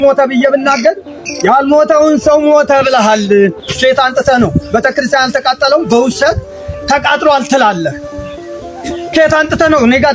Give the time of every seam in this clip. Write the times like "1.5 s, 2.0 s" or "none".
none